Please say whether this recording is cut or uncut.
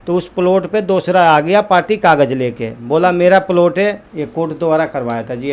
cut